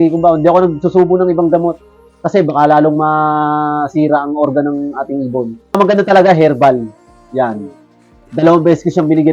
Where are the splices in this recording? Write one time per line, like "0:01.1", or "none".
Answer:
0:05.8